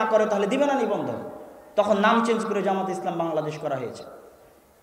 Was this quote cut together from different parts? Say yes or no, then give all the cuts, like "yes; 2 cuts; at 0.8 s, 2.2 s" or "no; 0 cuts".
no; 0 cuts